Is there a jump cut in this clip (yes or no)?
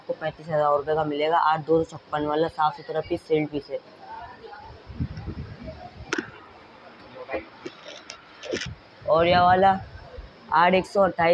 no